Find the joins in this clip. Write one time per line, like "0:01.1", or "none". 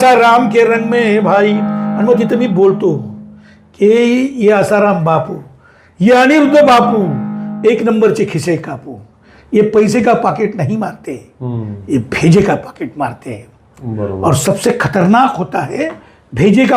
none